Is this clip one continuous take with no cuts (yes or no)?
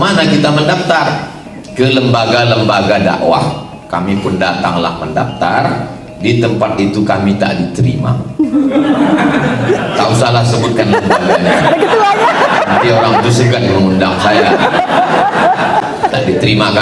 yes